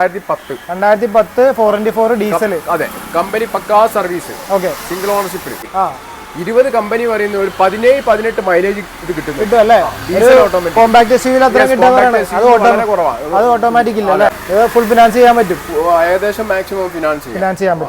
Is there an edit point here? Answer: yes; 2 cuts; at 5.6 s, 14.4 s

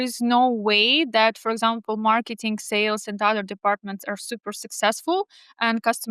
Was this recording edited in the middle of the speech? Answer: no; 0 cuts

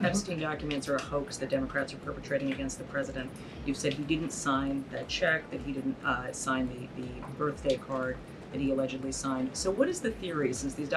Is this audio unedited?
yes; 0 cuts

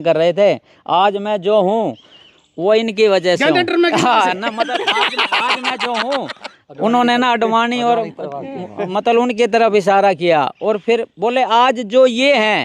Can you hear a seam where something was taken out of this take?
no; 0 cuts

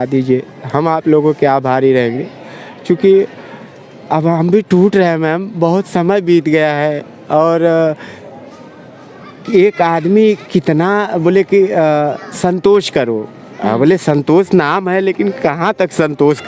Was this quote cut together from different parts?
no; 0 cuts

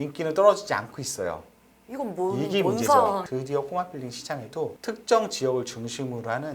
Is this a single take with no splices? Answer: no; 1 cut; at 3.2 s

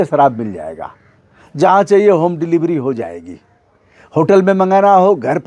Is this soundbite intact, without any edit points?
yes; 0 cuts

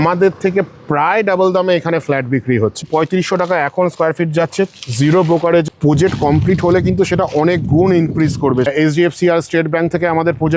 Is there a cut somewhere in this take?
yes; 3 cuts; at 2.8 s, 5.6 s, 8.7 s

